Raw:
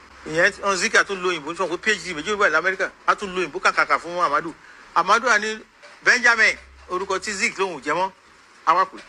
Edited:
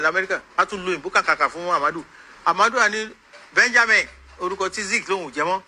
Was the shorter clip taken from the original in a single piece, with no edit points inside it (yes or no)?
yes